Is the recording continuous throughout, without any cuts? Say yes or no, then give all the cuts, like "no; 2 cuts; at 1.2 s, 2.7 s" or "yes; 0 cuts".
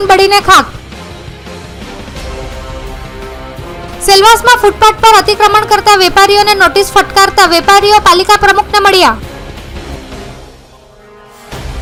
yes; 0 cuts